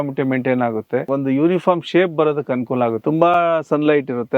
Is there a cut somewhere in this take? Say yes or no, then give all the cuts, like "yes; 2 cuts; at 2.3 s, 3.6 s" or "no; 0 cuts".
yes; 2 cuts; at 1.1 s, 3.0 s